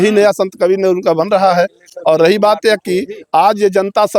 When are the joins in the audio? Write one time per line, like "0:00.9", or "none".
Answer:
none